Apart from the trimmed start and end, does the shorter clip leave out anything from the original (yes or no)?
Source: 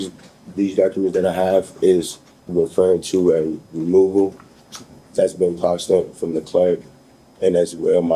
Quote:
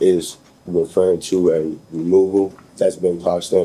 yes